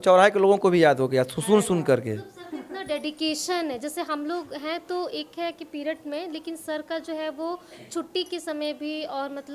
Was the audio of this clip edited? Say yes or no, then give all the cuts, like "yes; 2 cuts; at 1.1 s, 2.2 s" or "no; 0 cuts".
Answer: no; 0 cuts